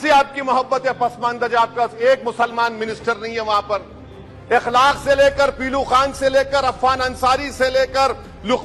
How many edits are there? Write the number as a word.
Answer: zero